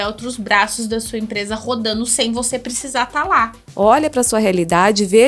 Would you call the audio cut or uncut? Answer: cut